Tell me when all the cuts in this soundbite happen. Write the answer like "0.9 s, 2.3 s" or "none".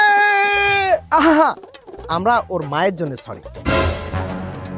none